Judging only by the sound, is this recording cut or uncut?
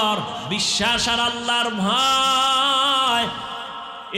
uncut